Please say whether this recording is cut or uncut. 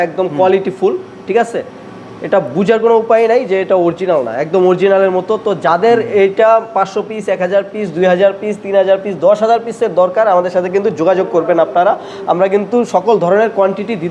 uncut